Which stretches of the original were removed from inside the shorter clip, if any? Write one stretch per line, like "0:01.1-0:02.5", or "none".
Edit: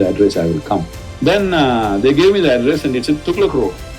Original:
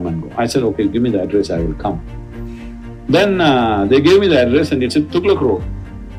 0:02.1-0:02.9